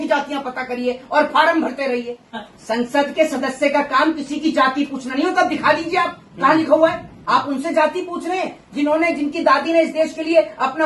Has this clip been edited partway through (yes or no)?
yes